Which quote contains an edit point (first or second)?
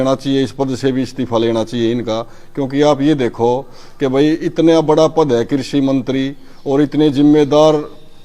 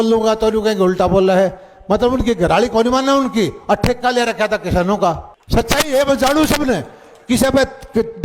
second